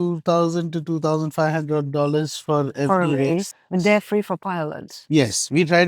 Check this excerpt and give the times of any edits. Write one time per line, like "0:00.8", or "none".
0:03.5